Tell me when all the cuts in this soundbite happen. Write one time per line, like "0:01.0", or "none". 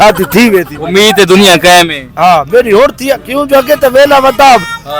none